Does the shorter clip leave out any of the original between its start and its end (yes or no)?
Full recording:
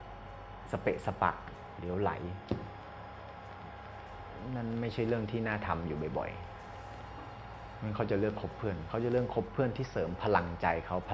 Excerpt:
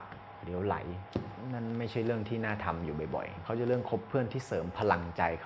yes